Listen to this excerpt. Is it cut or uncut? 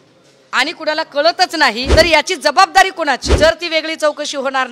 cut